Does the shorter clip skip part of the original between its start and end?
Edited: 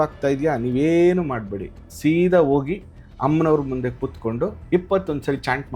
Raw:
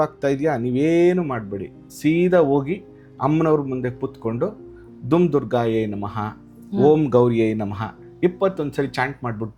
yes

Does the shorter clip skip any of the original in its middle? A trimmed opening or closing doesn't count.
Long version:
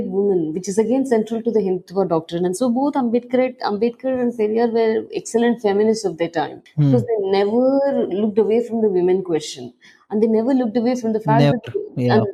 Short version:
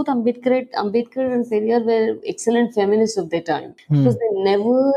no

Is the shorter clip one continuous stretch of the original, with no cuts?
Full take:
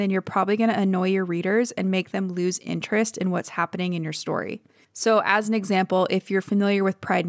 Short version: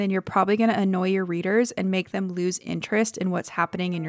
yes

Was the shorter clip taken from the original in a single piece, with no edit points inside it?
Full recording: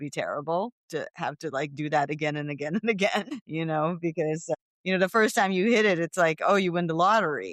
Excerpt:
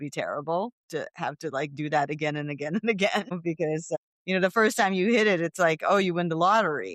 no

